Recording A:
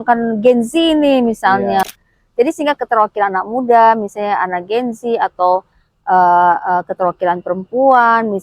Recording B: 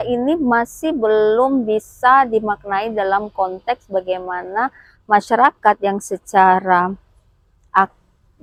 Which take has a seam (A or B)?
A